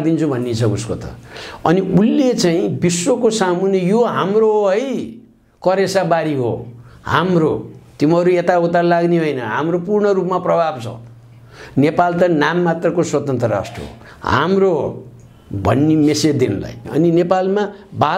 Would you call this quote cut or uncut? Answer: cut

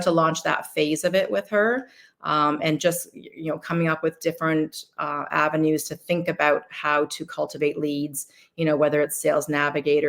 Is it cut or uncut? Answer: uncut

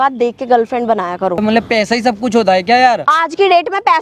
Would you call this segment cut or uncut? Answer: cut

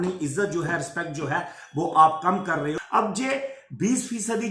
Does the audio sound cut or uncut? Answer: cut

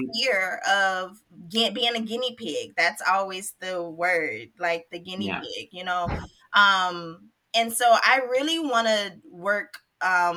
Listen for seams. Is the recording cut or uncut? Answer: uncut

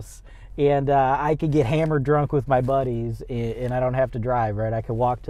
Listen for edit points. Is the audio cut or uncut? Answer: uncut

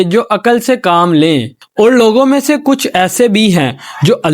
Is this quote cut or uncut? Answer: cut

